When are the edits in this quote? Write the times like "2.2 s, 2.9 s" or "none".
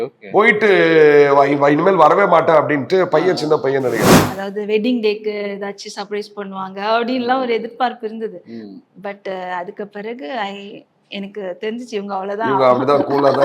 4.2 s